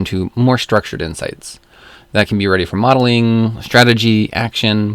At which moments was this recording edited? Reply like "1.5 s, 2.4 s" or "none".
none